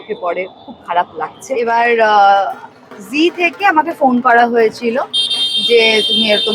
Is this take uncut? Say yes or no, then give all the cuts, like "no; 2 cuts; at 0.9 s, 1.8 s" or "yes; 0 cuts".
no; 1 cut; at 1.6 s